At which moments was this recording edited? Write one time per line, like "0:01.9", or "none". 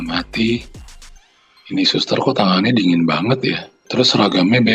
0:03.8